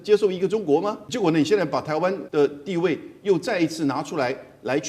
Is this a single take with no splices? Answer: no; 2 cuts; at 1.1 s, 2.2 s

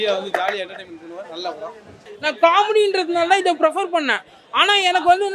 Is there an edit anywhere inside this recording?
yes; 1 cut; at 2.1 s

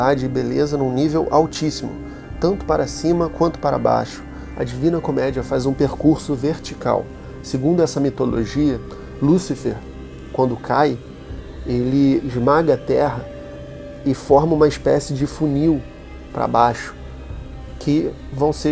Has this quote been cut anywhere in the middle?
yes; 1 cut; at 4.5 s

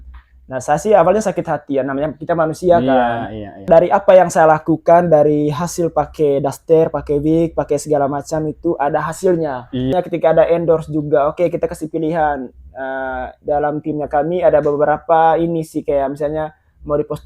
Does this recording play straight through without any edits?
no; 2 cuts; at 3.6 s, 9.9 s

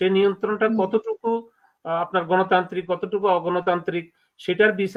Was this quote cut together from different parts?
no; 0 cuts

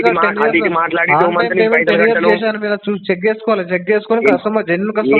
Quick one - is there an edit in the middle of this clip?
no; 0 cuts

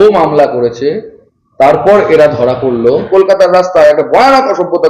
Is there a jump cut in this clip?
yes; 1 cut; at 3.1 s

